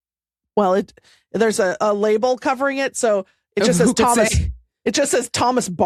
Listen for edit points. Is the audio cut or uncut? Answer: uncut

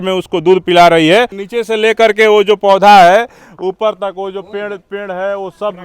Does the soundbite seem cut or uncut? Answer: cut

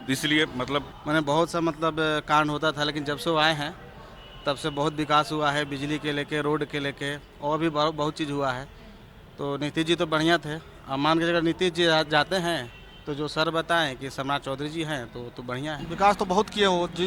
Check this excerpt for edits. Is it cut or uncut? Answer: cut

